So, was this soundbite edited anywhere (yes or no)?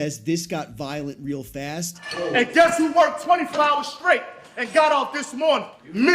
yes